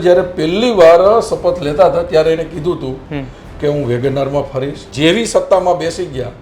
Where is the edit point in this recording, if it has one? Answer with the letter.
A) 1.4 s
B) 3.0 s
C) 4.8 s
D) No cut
C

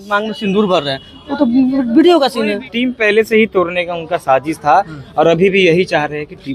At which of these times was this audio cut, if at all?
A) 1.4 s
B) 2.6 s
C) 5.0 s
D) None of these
B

